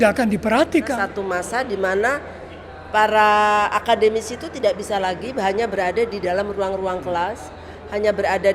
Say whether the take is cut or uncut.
cut